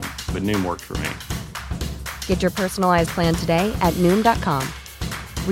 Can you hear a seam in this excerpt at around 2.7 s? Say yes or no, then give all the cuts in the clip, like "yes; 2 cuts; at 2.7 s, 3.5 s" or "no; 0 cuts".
no; 0 cuts